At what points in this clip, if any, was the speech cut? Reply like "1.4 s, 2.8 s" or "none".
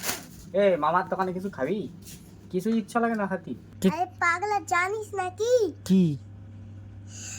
3.6 s